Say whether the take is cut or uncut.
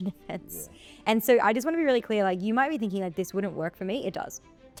uncut